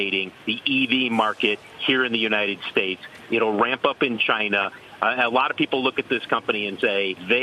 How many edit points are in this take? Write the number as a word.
zero